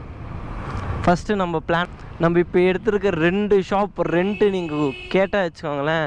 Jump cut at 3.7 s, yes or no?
no